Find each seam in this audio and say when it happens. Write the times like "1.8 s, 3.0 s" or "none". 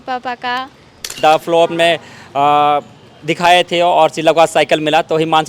1.2 s